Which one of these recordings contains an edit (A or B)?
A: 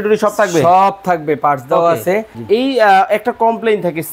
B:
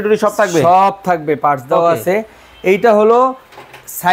A